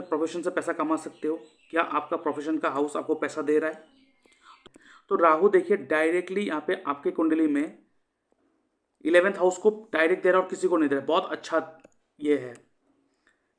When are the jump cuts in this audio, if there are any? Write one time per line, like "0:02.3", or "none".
0:04.5